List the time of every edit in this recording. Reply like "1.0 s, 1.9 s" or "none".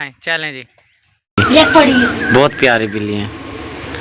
1.3 s